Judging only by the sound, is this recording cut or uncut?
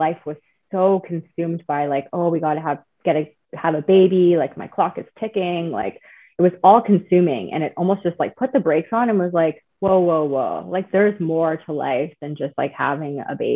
uncut